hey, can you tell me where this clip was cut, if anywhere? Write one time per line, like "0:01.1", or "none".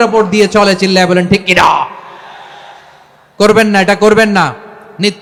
none